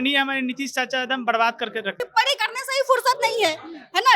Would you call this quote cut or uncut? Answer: cut